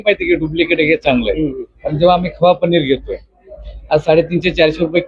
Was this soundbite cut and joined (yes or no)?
no